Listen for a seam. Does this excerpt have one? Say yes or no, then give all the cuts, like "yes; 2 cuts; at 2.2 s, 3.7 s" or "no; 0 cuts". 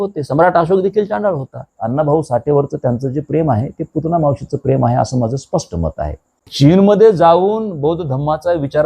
yes; 2 cuts; at 1.7 s, 6.5 s